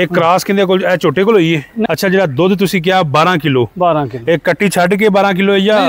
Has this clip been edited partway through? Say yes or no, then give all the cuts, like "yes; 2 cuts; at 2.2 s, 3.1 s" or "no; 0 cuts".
yes; 1 cut; at 1.7 s